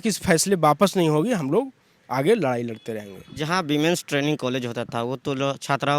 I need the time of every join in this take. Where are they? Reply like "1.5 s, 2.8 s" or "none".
none